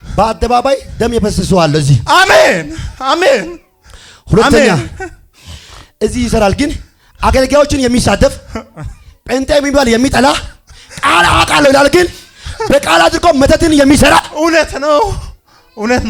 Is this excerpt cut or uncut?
uncut